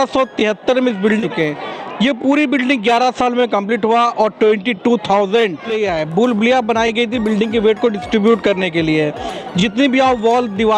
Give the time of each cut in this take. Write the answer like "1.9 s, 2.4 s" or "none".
1.2 s, 5.7 s

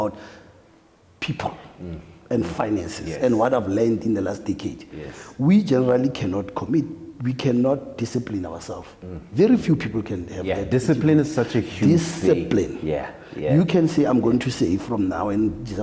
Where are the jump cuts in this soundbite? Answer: none

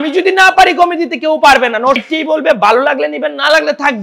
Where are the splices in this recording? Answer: 2.0 s

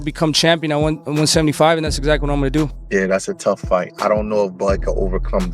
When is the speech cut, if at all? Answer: 2.6 s

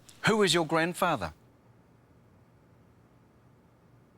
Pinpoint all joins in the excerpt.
none

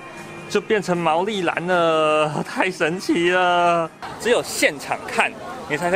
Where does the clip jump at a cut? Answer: 4.0 s

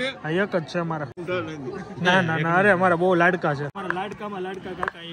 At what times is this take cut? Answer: 1.2 s, 3.8 s

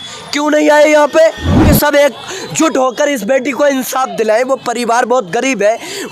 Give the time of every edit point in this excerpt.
1.5 s

